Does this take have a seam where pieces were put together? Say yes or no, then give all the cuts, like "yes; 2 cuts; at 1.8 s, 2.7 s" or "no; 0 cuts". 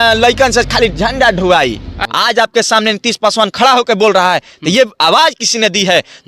yes; 1 cut; at 2.0 s